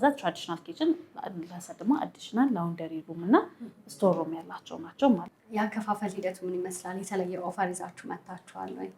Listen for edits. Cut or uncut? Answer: cut